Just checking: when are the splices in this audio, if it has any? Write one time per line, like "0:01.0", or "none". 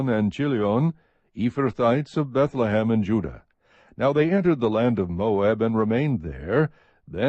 0:04.4

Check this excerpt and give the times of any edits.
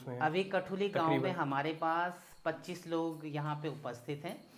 none

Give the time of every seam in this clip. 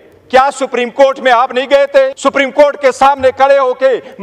0:02.1

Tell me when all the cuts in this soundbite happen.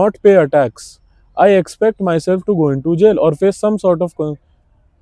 none

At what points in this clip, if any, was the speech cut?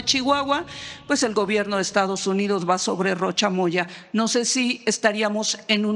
none

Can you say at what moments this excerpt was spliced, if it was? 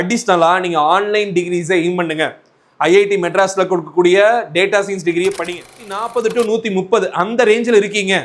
0:06.0

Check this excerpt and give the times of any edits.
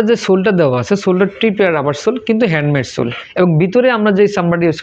0:03.2

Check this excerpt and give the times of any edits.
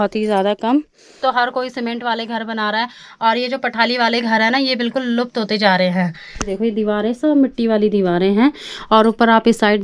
0:01.0
0:06.5

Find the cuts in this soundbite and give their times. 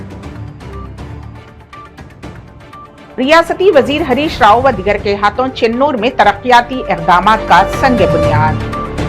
0:02.5

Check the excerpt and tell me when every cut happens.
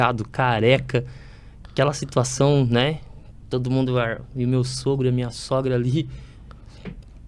none

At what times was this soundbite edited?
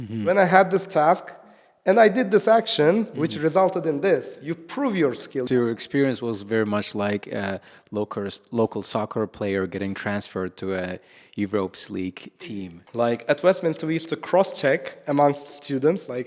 0:05.4
0:12.2

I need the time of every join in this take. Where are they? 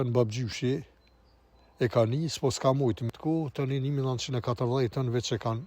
0:03.1

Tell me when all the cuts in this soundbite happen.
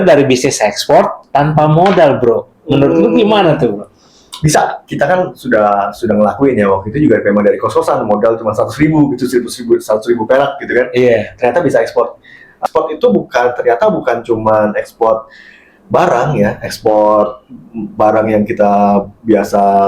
0:04.8
0:12.6

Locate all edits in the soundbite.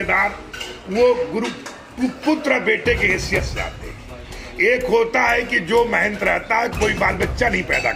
none

